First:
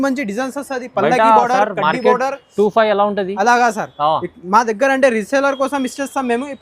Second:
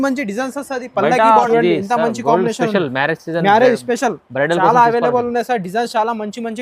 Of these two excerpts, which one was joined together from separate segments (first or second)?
second